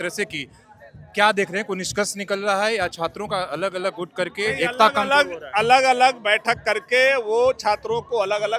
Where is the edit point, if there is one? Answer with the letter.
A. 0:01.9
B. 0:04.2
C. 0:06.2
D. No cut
D